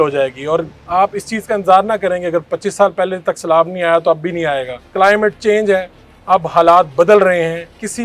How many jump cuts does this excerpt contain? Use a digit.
1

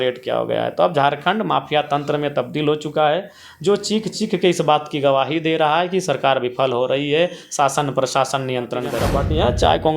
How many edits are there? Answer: 1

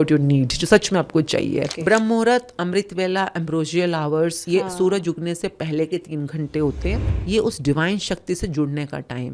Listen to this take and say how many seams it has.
2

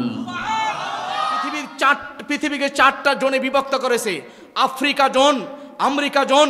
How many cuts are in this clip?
1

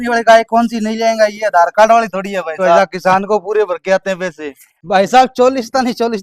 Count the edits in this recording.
2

